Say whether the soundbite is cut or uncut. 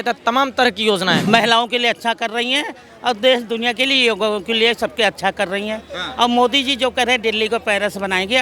cut